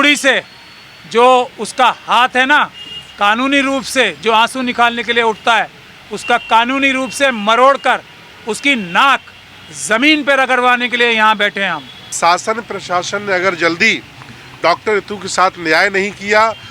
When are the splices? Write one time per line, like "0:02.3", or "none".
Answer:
0:12.0